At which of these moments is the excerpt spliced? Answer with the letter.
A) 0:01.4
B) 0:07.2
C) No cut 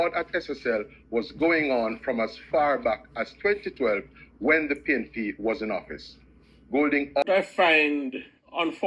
B